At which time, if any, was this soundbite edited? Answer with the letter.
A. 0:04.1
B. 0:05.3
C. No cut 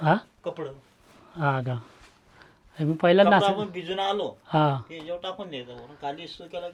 C